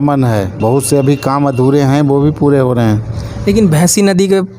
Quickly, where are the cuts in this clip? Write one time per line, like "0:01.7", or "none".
none